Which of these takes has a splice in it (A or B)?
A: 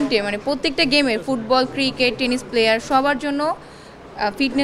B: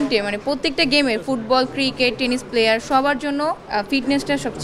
B